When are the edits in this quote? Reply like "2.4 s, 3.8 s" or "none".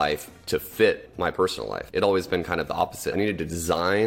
1.4 s, 3.1 s